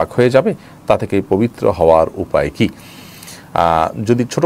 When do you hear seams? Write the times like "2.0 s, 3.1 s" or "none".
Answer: none